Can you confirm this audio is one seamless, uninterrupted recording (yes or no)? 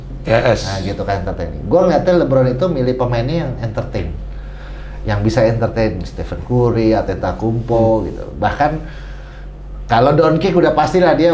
yes